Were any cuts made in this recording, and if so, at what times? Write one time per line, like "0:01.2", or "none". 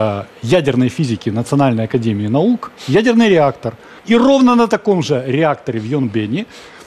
0:03.9